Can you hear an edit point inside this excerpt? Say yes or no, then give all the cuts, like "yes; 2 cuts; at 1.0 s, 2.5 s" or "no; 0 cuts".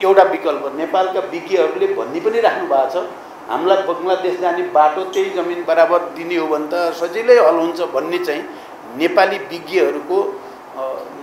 no; 0 cuts